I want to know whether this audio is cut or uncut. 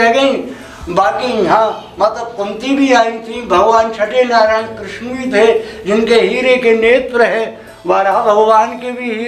uncut